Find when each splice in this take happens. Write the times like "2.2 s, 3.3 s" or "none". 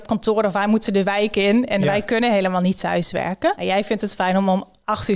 3.6 s